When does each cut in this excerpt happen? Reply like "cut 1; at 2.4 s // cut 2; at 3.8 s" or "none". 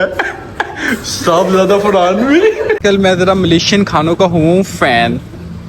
cut 1; at 2.8 s